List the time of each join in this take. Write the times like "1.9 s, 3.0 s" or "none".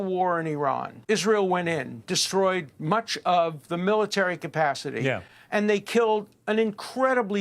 0.9 s